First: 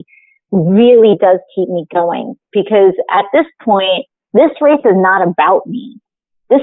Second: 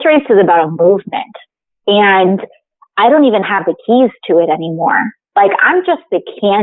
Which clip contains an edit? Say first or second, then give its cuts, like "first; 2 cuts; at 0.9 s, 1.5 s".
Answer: first; 1 cut; at 4.1 s